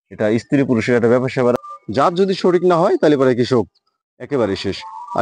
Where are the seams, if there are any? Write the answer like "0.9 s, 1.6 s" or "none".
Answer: 1.5 s